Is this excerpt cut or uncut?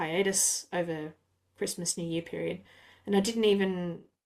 uncut